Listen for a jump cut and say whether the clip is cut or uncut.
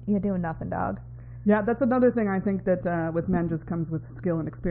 uncut